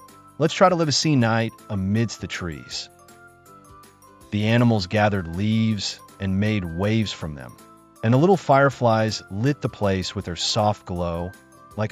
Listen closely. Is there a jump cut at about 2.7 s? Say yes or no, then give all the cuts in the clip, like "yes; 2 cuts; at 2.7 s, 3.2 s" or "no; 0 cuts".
yes; 2 cuts; at 2.7 s, 4.0 s